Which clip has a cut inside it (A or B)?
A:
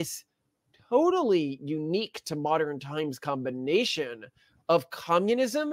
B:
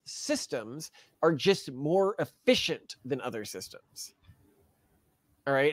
B